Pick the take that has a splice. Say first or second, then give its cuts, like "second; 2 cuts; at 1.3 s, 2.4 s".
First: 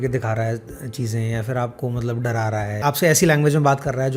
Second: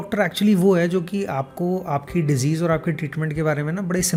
first; 1 cut; at 2.8 s